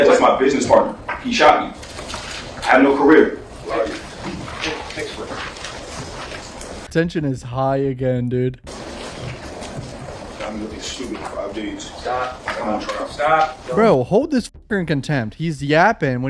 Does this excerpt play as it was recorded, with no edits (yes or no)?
yes